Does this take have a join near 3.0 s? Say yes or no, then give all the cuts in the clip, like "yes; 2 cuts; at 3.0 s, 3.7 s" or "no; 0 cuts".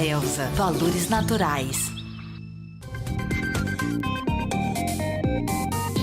yes; 1 cut; at 3.0 s